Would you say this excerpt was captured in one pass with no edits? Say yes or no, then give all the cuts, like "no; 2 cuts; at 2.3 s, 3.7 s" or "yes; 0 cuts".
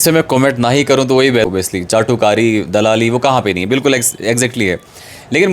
no; 1 cut; at 1.4 s